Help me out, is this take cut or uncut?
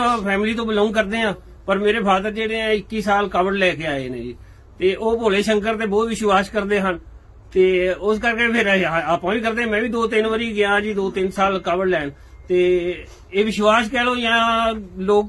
uncut